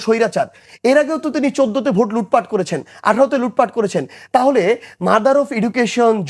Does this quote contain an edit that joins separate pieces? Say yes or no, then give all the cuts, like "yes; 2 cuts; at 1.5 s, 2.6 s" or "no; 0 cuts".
no; 0 cuts